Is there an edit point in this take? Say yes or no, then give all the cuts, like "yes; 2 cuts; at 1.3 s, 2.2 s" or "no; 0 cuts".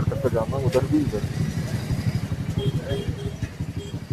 no; 0 cuts